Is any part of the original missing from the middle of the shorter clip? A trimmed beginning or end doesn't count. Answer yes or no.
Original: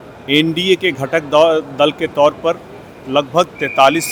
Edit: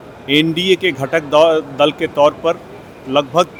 no